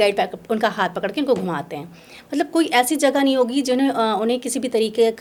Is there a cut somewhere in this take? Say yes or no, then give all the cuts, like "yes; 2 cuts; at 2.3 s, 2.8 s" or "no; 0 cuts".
no; 0 cuts